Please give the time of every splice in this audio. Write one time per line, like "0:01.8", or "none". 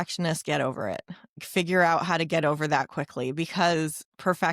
0:01.4

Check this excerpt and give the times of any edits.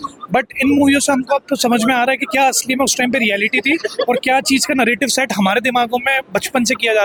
none

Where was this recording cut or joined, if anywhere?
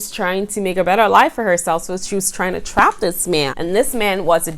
0:03.5

